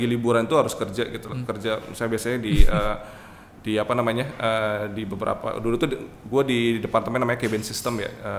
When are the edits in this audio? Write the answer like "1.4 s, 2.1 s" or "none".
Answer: none